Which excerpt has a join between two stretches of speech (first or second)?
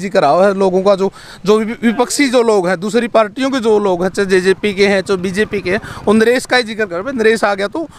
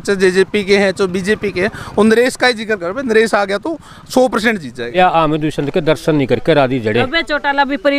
second